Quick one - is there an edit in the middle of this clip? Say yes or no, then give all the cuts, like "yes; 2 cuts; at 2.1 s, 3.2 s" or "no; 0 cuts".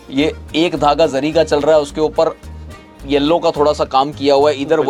no; 0 cuts